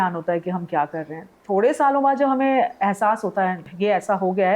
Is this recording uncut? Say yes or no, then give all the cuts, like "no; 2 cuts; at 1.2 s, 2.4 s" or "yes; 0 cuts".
no; 1 cut; at 3.6 s